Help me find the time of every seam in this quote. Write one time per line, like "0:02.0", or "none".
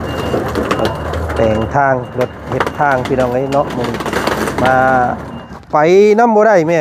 0:05.5